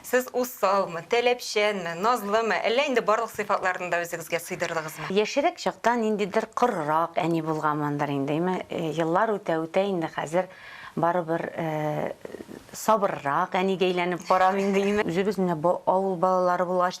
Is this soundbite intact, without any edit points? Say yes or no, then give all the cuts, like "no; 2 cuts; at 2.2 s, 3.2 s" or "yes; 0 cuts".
no; 2 cuts; at 5.1 s, 15.0 s